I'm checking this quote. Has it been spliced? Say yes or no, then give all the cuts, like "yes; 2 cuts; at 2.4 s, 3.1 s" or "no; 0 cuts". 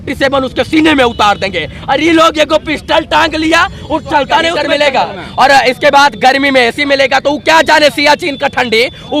yes; 1 cut; at 4.6 s